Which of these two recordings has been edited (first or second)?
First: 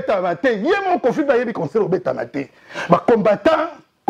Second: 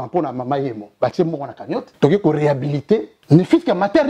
second